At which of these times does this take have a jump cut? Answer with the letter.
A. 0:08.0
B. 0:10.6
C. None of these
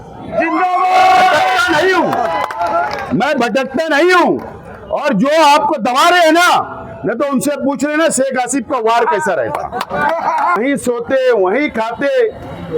B